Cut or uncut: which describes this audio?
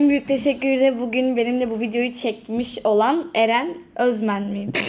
uncut